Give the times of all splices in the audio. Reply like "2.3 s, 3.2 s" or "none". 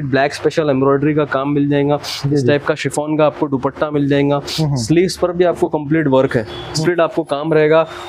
6.7 s